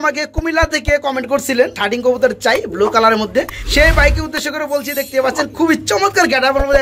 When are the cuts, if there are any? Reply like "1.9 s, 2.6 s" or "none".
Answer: 1.8 s, 3.6 s